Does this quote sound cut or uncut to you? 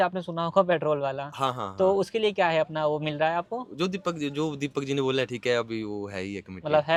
uncut